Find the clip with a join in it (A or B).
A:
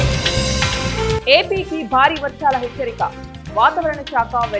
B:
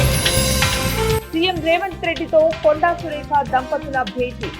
B